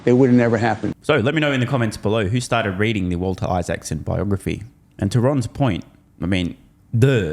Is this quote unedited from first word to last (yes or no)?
yes